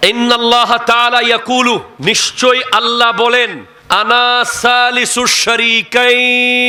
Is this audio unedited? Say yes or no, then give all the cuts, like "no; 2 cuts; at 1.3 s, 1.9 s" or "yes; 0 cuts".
yes; 0 cuts